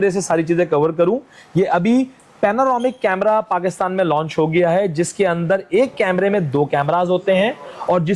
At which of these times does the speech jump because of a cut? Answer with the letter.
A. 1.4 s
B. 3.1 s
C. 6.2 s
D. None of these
D